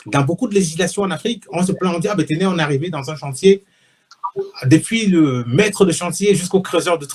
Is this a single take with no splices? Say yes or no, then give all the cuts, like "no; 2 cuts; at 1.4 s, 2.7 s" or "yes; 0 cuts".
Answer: yes; 0 cuts